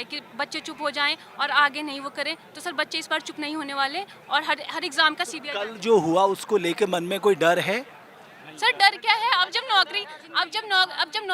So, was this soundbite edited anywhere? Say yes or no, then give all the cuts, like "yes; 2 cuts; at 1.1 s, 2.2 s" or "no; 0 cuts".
no; 0 cuts